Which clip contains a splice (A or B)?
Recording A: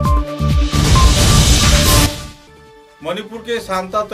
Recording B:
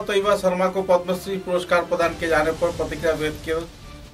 A